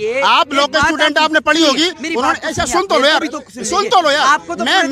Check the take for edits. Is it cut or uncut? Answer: uncut